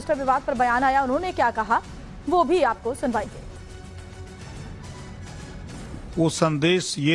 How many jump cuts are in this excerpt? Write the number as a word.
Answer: zero